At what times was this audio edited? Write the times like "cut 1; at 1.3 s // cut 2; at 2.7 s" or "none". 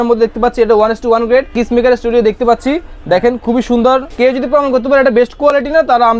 cut 1; at 1.6 s // cut 2; at 4.1 s